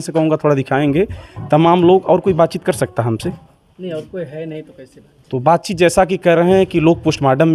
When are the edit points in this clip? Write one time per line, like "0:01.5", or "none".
none